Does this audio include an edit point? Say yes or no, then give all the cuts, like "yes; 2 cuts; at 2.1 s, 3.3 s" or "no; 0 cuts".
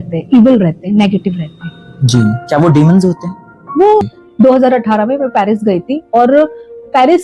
yes; 1 cut; at 4.2 s